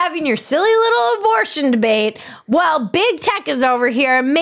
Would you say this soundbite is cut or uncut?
uncut